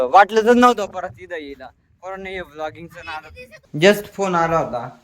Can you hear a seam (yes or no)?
yes